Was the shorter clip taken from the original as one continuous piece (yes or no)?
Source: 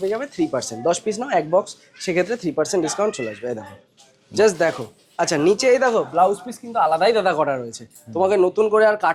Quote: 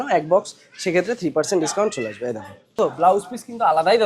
no